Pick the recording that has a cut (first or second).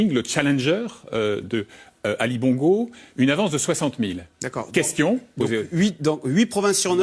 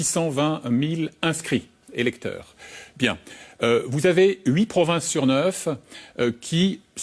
first